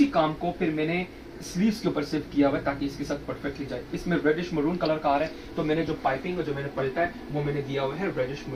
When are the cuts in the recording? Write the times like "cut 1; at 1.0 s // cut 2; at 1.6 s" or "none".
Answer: none

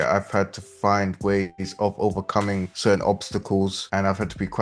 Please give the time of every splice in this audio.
cut 1; at 2.7 s // cut 2; at 3.8 s

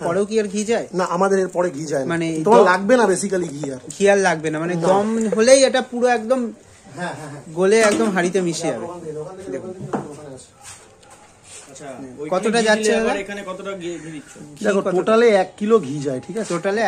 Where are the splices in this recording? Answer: none

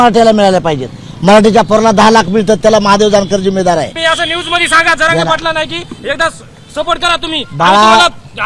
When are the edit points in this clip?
cut 1; at 3.9 s

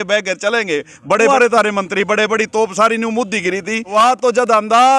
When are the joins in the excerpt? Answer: cut 1; at 1.3 s // cut 2; at 3.8 s

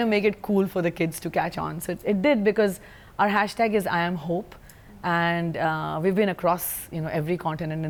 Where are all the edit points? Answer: none

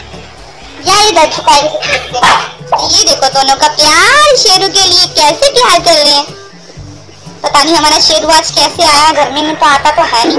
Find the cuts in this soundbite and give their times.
cut 1; at 2.9 s

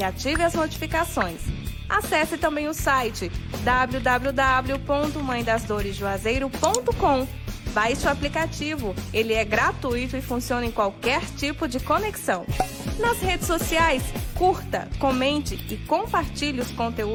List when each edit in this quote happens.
none

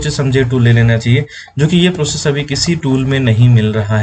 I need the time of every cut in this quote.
none

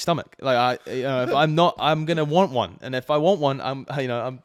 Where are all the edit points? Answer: none

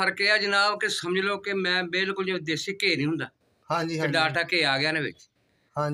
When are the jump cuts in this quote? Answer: none

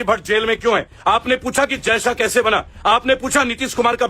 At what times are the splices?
cut 1; at 0.9 s // cut 2; at 2.7 s

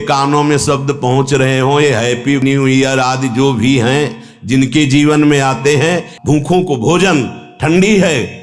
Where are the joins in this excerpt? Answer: cut 1; at 6.1 s

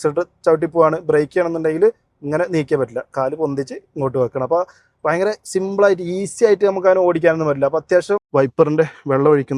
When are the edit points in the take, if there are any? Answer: cut 1; at 8.3 s

